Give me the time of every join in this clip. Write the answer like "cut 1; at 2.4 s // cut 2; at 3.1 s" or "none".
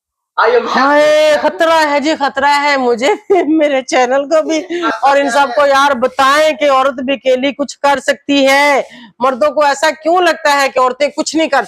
cut 1; at 4.9 s